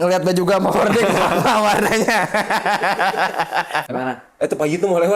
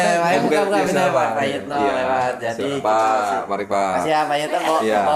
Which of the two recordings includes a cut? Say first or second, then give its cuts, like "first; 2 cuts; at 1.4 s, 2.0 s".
first; 1 cut; at 3.9 s